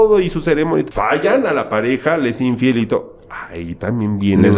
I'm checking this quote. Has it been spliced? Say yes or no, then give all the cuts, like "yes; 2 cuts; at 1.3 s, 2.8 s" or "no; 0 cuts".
yes; 1 cut; at 0.9 s